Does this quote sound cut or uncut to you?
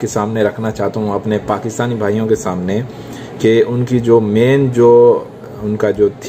uncut